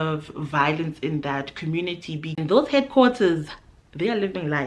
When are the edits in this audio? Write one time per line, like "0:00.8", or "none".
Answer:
0:02.4